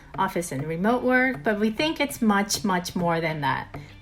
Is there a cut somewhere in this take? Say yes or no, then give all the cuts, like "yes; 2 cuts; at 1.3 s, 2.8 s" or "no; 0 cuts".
no; 0 cuts